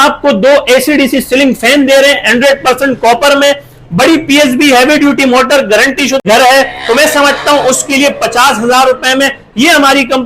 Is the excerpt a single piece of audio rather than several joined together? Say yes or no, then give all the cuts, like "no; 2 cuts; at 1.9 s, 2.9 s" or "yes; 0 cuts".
no; 1 cut; at 6.2 s